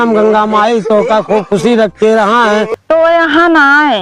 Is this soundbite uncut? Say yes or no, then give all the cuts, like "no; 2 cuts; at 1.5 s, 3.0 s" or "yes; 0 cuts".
no; 1 cut; at 2.7 s